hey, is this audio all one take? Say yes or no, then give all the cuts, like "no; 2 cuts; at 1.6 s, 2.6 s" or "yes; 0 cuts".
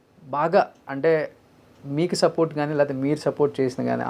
yes; 0 cuts